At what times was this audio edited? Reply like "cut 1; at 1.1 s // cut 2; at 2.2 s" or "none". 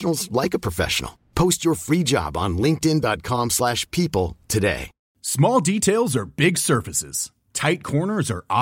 cut 1; at 5.0 s

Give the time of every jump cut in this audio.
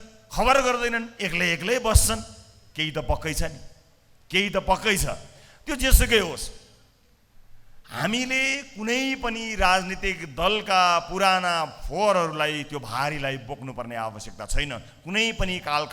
none

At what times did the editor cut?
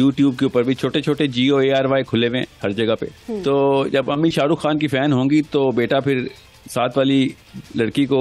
cut 1; at 3.3 s

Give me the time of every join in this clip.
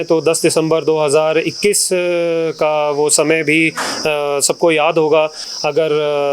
none

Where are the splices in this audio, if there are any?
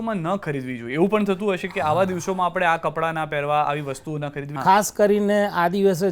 cut 1; at 4.5 s

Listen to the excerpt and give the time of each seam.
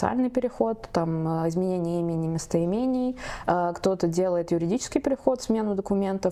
none

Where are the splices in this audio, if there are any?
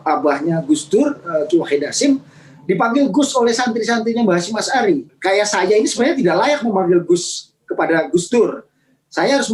cut 1; at 5.1 s

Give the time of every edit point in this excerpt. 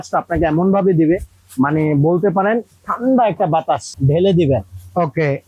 cut 1; at 3.9 s

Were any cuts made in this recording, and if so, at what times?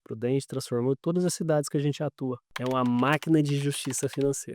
cut 1; at 2.5 s

